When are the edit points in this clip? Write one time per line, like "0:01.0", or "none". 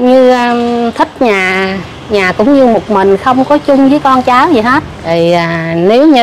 0:04.9